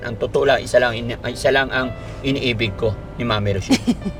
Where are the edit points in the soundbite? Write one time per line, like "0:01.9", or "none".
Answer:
none